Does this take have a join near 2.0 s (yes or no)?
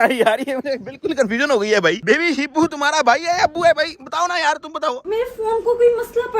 yes